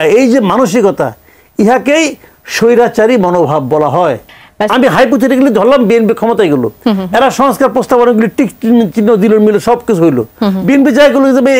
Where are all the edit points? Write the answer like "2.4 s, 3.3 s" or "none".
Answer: 4.7 s